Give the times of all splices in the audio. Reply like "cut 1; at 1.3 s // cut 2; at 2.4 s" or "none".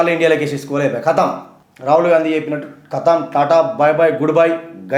none